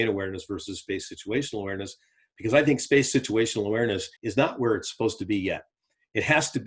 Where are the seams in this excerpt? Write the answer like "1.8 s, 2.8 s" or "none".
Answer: 4.2 s